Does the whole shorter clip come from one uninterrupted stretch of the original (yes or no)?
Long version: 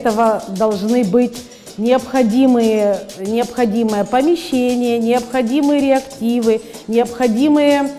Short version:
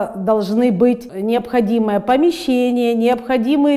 no